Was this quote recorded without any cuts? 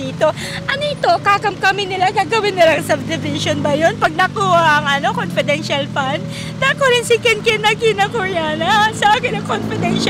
yes; 0 cuts

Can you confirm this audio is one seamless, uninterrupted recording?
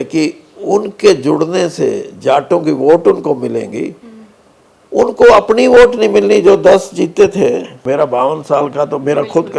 no; 1 cut; at 7.8 s

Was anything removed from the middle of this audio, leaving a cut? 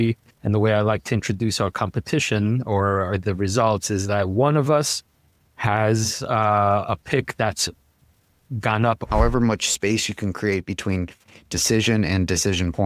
yes; 1 cut; at 9.0 s

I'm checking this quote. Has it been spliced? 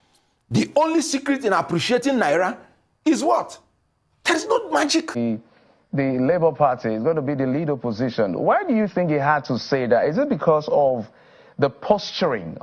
yes; 1 cut; at 5.2 s

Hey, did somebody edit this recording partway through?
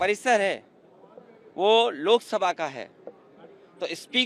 no; 0 cuts

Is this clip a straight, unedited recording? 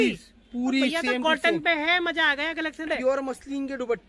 no; 1 cut; at 2.9 s

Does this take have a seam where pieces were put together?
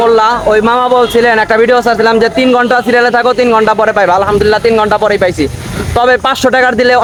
no; 0 cuts

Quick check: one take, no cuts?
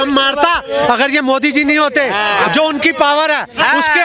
yes; 0 cuts

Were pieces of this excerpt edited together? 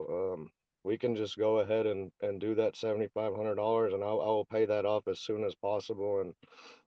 no; 0 cuts

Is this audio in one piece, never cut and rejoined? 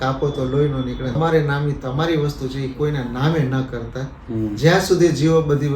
no; 1 cut; at 1.2 s

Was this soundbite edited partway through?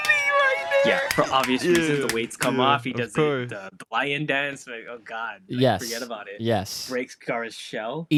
no; 0 cuts

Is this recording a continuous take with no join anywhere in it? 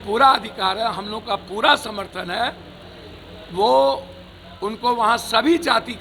yes; 0 cuts

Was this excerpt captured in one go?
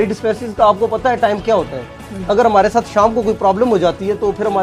yes; 0 cuts

